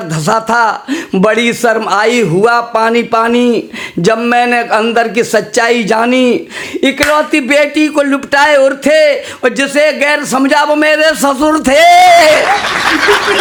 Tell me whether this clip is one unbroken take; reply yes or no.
yes